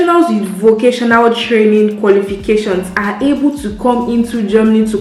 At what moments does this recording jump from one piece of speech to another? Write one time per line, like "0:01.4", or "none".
none